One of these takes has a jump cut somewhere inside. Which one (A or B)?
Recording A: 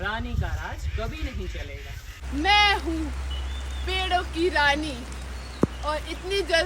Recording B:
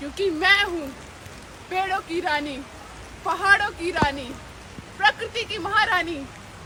A